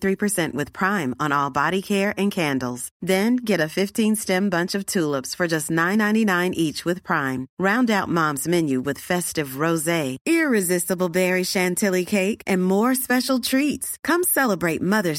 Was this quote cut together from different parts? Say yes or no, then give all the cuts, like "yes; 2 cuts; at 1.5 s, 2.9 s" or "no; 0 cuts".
no; 0 cuts